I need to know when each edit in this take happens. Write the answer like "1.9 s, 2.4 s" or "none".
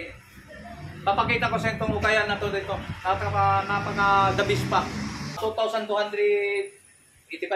5.6 s